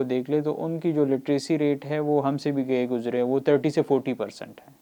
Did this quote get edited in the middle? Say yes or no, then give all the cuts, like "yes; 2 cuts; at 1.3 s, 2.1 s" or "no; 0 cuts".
no; 0 cuts